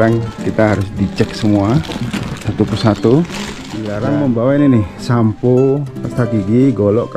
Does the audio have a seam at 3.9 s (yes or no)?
yes